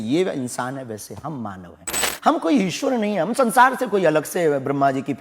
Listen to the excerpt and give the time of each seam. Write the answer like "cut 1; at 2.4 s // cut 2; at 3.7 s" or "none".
cut 1; at 2.1 s